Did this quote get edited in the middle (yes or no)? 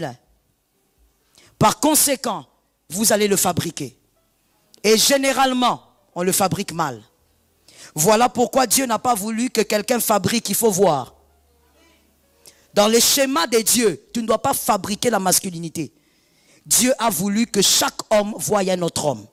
no